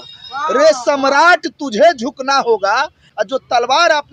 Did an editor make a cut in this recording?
no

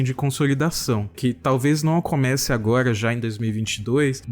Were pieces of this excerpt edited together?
yes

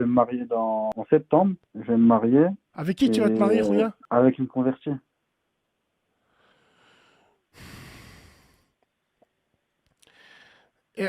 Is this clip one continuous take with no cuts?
no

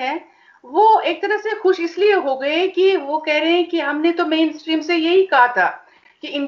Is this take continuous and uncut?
yes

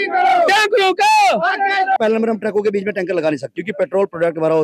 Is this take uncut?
no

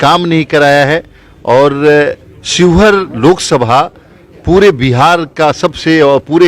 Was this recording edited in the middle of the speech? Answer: no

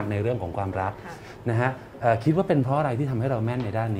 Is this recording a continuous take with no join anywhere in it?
yes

